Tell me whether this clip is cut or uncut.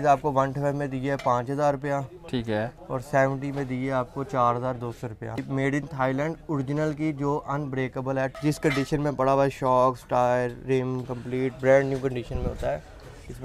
cut